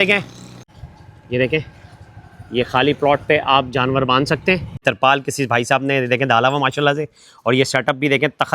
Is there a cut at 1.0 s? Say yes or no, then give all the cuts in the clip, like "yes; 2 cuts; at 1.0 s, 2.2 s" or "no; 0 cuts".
yes; 2 cuts; at 1.0 s, 4.8 s